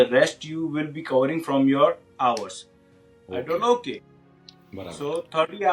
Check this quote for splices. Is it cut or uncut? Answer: uncut